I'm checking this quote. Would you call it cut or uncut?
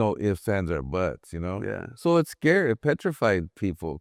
uncut